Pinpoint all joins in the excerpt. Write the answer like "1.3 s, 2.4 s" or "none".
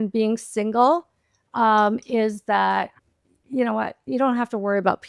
2.9 s

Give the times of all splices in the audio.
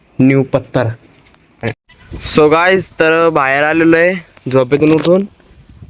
1.7 s

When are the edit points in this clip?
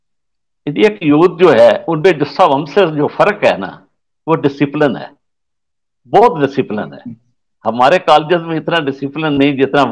none

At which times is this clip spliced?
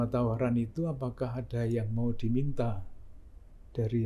none

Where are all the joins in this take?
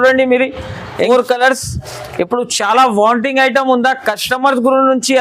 1.0 s

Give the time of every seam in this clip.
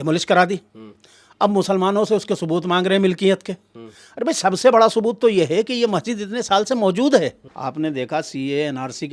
7.5 s

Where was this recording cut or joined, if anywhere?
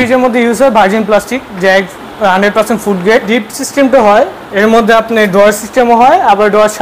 3.3 s

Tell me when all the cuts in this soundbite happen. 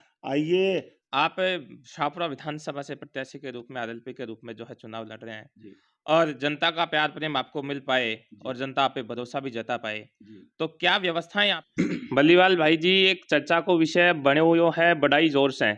1.0 s, 11.6 s

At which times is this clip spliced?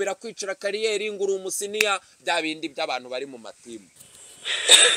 3.9 s

